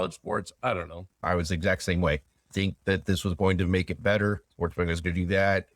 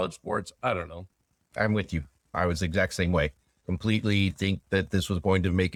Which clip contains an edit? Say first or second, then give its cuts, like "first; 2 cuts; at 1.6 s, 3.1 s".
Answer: first; 3 cuts; at 1.1 s, 2.5 s, 4.5 s